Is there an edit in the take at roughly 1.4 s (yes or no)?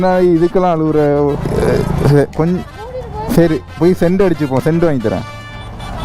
yes